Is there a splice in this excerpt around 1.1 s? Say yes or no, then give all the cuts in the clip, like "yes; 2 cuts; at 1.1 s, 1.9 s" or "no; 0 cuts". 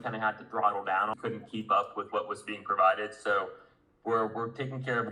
yes; 1 cut; at 1.1 s